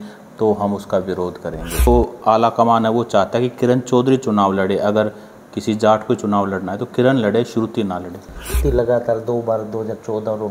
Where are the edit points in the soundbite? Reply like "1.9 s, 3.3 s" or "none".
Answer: 1.9 s, 8.6 s